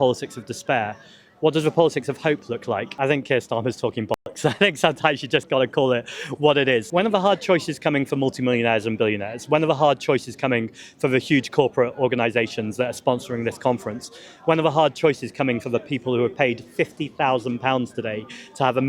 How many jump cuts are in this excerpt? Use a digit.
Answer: 2